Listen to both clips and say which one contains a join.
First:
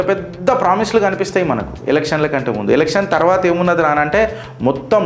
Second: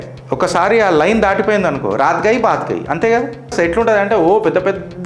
second; 1 cut; at 3.5 s

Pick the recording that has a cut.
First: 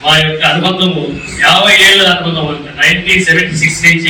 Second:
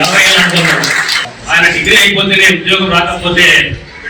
second; 1 cut; at 1.1 s

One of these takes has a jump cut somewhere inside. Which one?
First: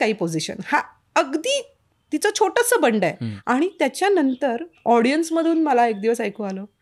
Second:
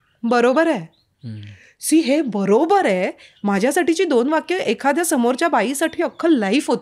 first; 2 cuts; at 3.3 s, 4.7 s

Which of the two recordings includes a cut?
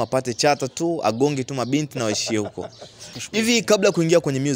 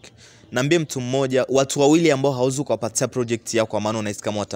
first; 1 cut; at 3.1 s

